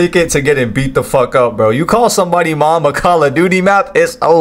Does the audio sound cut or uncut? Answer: uncut